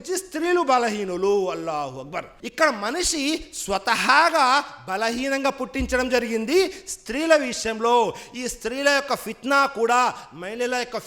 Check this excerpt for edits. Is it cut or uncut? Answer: uncut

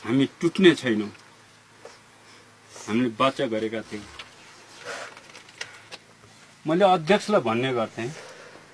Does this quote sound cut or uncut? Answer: cut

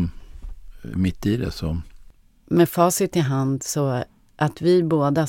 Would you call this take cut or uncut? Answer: cut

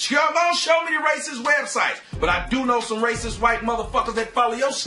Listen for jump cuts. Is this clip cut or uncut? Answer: cut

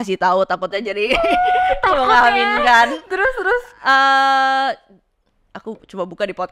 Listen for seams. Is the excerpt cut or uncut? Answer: uncut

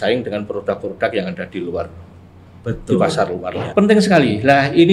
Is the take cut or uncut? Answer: cut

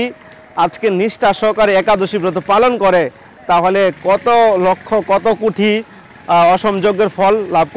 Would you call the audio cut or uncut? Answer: uncut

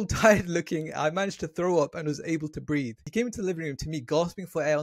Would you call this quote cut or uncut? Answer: cut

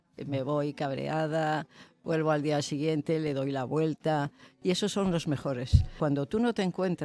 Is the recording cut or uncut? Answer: cut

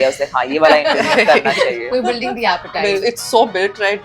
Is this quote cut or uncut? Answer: cut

